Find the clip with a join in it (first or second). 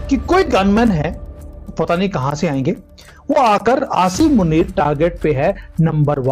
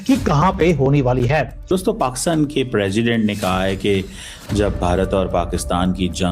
second